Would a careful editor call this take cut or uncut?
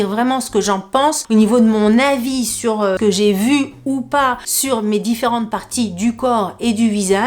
cut